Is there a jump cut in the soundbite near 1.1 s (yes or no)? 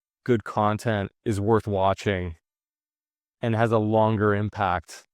yes